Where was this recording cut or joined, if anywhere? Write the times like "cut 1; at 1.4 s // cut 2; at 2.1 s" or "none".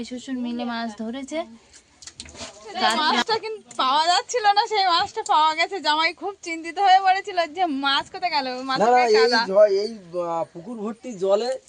cut 1; at 3.0 s